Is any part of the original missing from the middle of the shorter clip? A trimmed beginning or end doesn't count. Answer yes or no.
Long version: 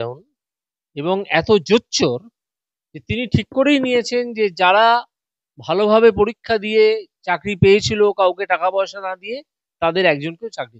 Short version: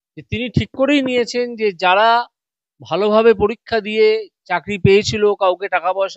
no